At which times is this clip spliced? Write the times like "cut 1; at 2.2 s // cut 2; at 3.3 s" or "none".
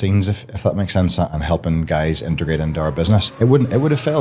cut 1; at 1.3 s // cut 2; at 3.3 s